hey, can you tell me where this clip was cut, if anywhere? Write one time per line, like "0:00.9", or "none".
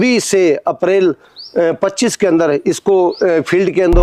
none